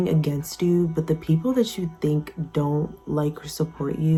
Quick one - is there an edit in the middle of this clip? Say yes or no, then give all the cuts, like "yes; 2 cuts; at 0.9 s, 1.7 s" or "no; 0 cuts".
no; 0 cuts